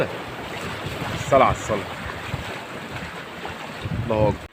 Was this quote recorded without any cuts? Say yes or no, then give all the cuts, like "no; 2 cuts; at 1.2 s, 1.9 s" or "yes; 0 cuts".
yes; 0 cuts